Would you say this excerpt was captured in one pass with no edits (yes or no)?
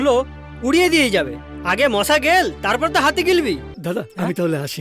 no